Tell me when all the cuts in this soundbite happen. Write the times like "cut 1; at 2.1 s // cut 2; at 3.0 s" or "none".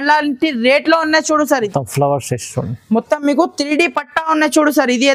cut 1; at 1.7 s